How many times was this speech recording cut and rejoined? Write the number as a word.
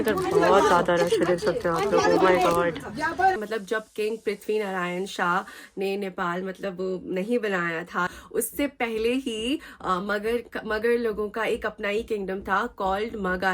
two